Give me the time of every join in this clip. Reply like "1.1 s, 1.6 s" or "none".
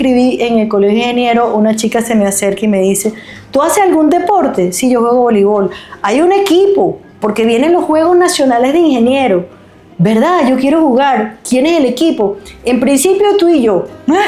none